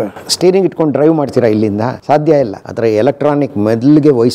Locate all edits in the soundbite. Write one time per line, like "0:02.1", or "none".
0:02.0
0:02.6